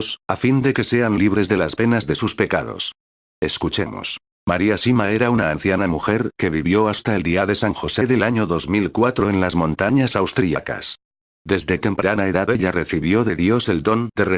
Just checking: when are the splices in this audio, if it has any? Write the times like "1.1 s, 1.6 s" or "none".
8.2 s